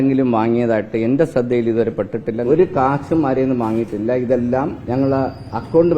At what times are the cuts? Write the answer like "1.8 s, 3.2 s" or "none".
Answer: 2.4 s, 4.8 s